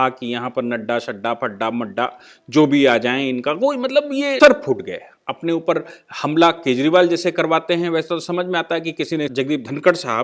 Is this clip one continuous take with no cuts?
no; 2 cuts; at 4.4 s, 9.3 s

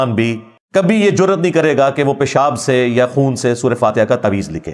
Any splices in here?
no; 0 cuts

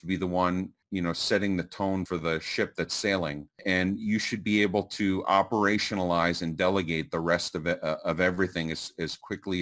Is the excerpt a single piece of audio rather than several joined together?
no; 2 cuts; at 2.1 s, 3.6 s

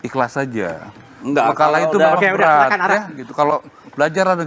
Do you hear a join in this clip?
no; 0 cuts

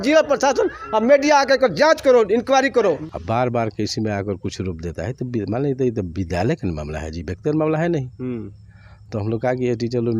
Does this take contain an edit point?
yes; 1 cut; at 3.0 s

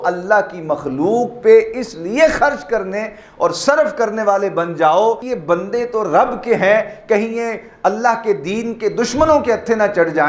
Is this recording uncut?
no; 1 cut; at 5.3 s

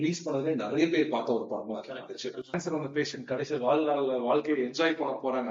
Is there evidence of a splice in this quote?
yes; 1 cut; at 2.5 s

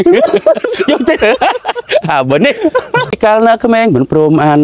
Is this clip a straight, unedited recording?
no; 1 cut; at 3.2 s

